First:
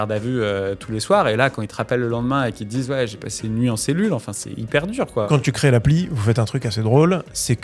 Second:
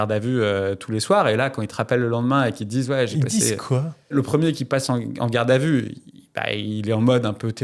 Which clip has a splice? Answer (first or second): first